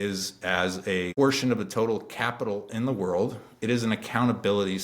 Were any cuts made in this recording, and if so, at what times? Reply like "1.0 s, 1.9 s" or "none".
1.1 s